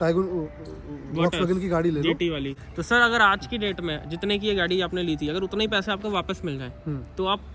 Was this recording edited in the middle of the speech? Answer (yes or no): yes